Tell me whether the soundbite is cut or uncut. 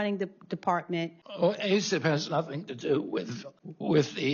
cut